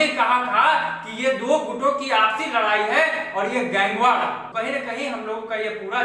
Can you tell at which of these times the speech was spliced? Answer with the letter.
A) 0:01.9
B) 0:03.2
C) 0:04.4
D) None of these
C